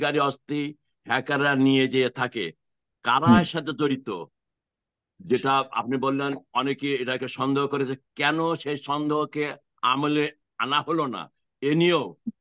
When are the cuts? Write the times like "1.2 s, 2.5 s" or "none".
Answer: none